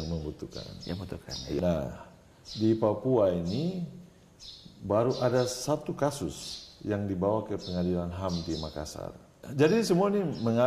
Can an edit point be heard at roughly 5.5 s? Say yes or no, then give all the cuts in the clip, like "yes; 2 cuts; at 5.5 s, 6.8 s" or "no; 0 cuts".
no; 2 cuts; at 1.6 s, 9.3 s